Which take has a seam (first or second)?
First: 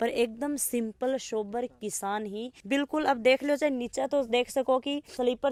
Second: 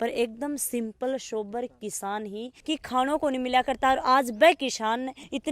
second